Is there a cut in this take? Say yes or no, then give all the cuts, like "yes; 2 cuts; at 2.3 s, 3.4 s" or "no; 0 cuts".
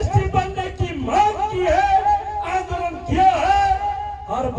no; 0 cuts